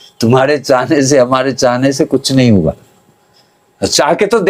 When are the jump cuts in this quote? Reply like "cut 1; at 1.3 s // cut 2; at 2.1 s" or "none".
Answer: none